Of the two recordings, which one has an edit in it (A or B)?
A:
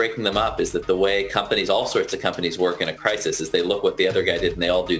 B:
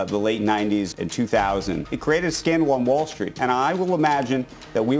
B